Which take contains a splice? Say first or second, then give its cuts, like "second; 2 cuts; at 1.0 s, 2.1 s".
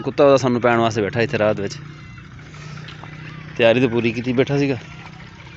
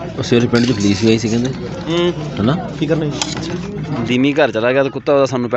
second; 1 cut; at 3.9 s